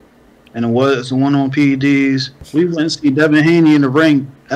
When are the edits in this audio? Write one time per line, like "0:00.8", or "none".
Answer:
0:02.4